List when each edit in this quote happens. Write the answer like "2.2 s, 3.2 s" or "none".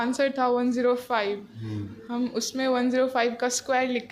none